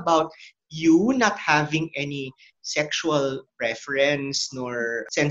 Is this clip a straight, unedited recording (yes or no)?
yes